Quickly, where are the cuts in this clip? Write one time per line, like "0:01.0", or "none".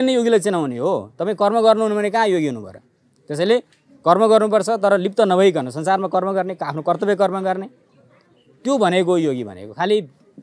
none